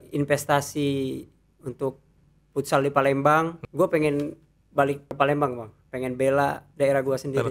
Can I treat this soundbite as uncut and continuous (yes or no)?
no